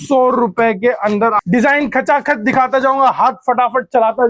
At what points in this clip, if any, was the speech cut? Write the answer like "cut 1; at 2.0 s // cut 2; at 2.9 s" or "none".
cut 1; at 1.4 s